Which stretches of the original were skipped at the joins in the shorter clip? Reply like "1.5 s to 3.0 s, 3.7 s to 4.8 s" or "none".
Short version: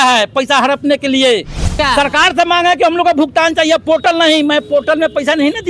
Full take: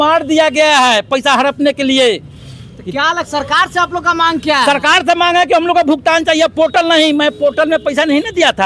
2.5 s to 4.4 s